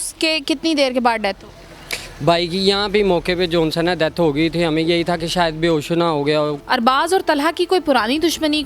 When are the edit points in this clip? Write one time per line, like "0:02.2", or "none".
0:06.6